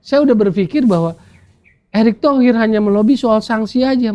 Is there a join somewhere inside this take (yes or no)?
no